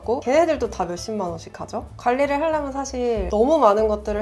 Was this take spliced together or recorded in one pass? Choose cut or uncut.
cut